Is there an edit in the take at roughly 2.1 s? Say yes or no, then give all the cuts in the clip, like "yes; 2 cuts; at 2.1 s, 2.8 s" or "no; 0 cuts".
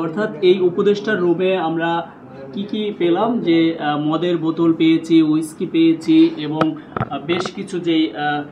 no; 0 cuts